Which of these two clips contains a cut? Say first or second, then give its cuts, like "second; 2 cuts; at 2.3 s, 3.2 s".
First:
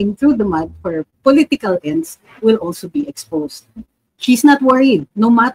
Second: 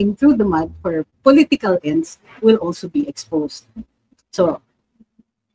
first; 1 cut; at 4.0 s